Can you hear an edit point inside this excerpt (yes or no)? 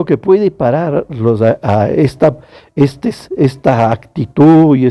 no